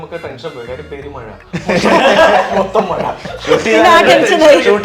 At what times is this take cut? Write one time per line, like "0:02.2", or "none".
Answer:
none